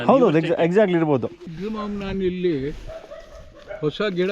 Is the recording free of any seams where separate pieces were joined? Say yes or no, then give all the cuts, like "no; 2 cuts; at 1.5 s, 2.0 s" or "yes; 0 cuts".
no; 1 cut; at 1.5 s